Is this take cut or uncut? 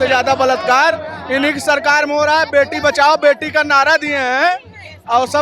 uncut